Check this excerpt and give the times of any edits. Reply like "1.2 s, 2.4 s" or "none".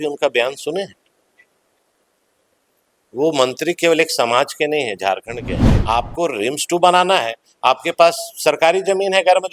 5.7 s